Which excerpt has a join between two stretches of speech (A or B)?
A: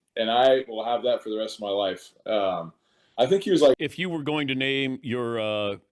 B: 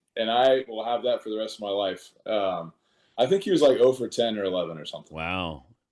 A